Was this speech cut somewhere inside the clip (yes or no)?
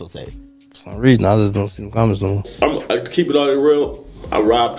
yes